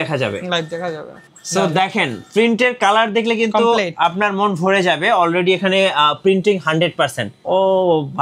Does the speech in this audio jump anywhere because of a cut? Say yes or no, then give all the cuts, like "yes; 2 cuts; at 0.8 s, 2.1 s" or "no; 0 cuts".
yes; 2 cuts; at 1.2 s, 7.4 s